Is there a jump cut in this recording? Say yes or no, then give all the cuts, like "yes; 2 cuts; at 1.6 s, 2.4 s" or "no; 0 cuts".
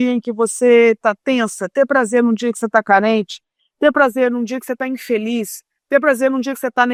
no; 0 cuts